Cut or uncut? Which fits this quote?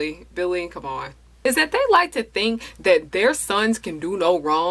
cut